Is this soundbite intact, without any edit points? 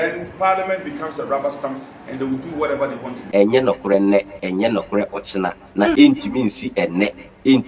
no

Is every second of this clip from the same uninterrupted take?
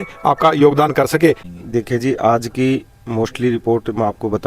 no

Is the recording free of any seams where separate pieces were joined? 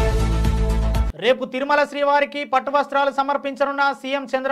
no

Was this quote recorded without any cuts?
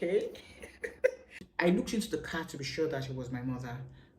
no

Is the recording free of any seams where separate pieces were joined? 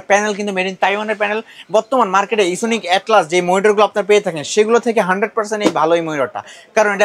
yes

